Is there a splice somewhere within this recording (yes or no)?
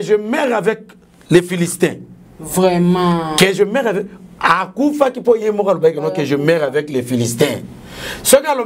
no